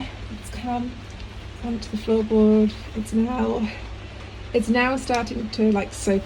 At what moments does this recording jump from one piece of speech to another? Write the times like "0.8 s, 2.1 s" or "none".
none